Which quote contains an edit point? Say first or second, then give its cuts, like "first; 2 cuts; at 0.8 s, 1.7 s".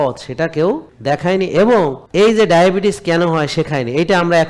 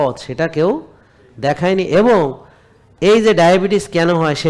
first; 2 cuts; at 0.9 s, 2.0 s